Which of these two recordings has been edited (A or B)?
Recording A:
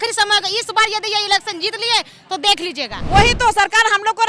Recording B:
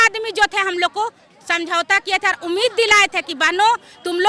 A